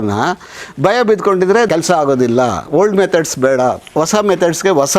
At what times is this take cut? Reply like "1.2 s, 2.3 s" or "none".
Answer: 1.7 s